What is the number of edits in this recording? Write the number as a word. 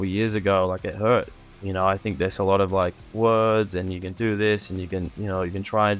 two